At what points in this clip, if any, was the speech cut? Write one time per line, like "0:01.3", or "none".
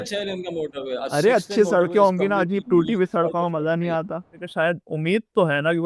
0:04.4